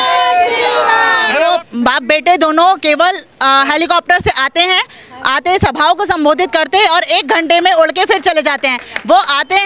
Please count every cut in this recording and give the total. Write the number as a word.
one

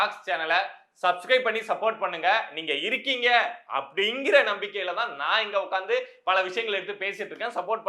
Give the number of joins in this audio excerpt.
zero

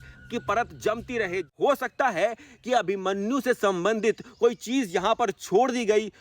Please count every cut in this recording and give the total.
one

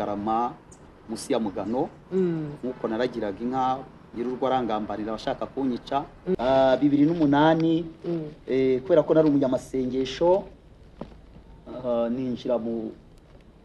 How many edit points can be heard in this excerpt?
one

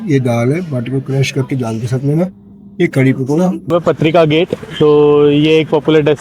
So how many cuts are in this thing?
one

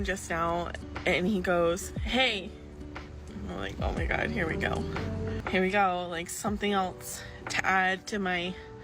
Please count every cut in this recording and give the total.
zero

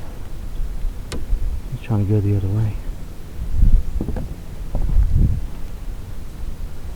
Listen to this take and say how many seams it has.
zero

